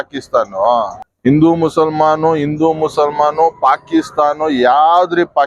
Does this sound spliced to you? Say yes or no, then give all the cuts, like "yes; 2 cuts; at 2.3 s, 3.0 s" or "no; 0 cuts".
yes; 1 cut; at 1.0 s